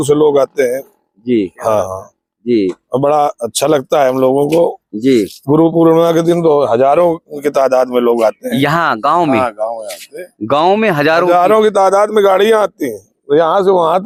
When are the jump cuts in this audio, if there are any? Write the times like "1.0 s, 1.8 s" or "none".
none

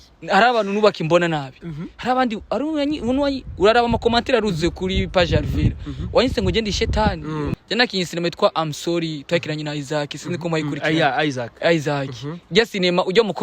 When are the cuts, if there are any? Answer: 7.6 s

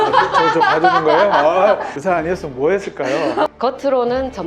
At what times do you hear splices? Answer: 3.5 s

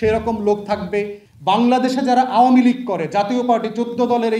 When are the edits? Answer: 1.2 s

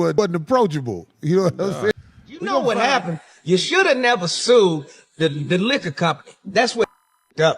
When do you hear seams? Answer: 2.6 s

